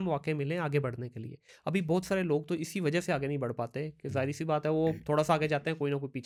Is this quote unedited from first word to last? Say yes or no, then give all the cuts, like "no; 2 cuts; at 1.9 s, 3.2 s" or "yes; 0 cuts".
yes; 0 cuts